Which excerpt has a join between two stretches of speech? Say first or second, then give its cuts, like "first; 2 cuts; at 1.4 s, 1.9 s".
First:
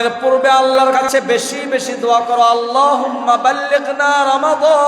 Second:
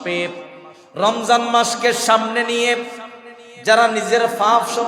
first; 1 cut; at 1.0 s